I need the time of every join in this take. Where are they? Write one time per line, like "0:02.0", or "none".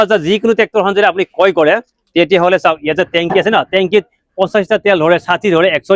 none